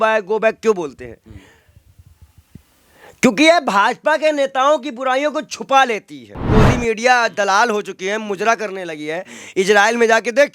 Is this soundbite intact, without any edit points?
no; 1 cut; at 6.4 s

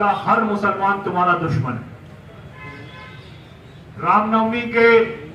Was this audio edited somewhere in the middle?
no; 0 cuts

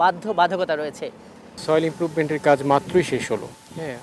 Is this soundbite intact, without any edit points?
no; 1 cut; at 1.6 s

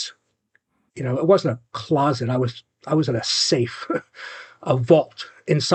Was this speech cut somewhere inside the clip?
no; 0 cuts

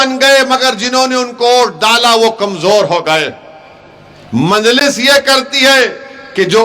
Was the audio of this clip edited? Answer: no; 0 cuts

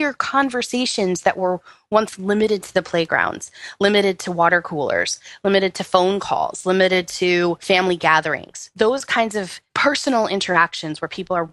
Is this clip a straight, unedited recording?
no; 2 cuts; at 7.6 s, 9.6 s

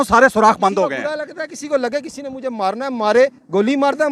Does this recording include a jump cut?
no; 0 cuts

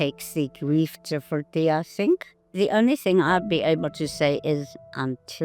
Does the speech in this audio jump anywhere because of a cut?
yes; 1 cut; at 2.4 s

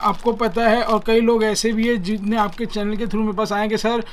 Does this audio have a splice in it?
no; 0 cuts

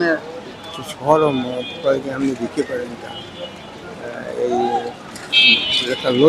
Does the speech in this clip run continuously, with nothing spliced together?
yes; 0 cuts

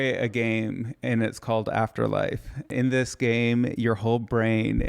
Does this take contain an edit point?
yes; 1 cut; at 2.7 s

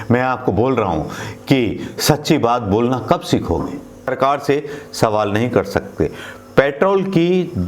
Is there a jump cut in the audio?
yes; 1 cut; at 4.1 s

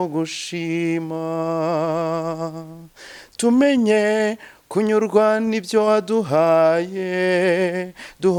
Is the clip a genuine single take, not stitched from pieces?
yes; 0 cuts

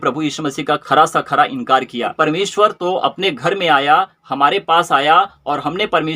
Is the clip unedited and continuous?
no; 1 cut; at 2.1 s

